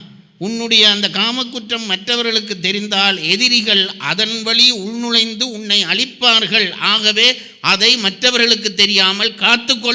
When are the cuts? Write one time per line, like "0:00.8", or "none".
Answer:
none